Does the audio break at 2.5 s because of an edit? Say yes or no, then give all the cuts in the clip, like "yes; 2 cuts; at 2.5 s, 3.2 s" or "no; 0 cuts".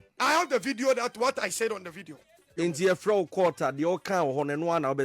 yes; 1 cut; at 2.5 s